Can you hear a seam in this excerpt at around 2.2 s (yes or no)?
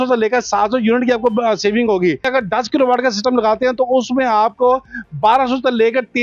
yes